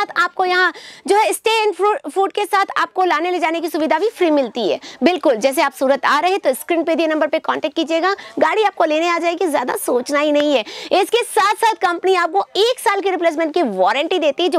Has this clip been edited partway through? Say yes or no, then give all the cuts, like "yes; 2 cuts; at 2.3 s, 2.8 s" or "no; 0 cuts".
no; 0 cuts